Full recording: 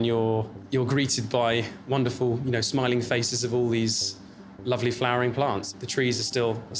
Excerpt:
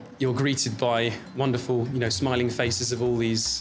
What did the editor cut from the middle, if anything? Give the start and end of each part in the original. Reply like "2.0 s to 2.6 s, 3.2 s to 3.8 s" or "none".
none